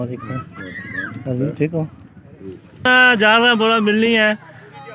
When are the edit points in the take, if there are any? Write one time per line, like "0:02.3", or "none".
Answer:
0:02.9